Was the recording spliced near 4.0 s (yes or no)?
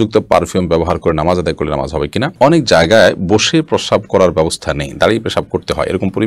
no